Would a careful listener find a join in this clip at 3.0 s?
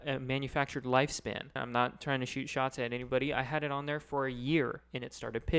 no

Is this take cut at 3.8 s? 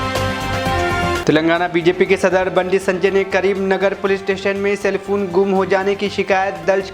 no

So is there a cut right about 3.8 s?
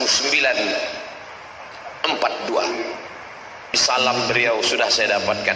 yes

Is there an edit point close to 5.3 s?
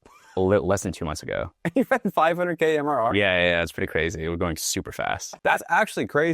yes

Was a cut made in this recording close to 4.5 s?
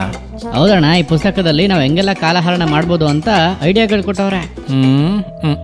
yes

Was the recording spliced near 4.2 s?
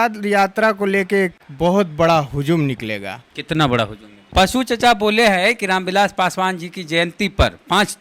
yes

